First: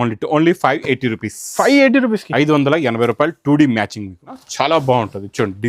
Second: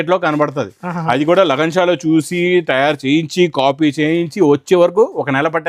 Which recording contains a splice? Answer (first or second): first